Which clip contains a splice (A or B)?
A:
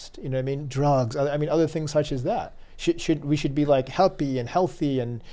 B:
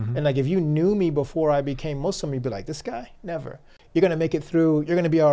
B